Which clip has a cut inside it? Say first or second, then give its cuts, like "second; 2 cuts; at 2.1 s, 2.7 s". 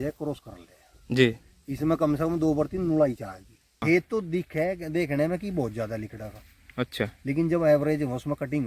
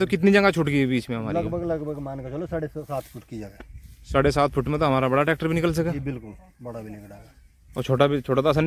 first; 1 cut; at 3.8 s